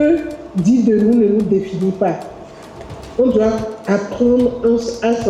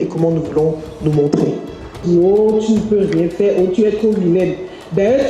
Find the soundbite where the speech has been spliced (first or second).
second